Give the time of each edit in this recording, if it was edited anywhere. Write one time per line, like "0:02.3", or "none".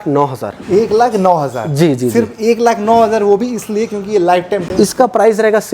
0:04.7